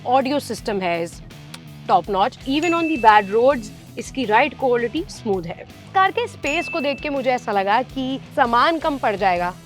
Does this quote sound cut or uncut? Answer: cut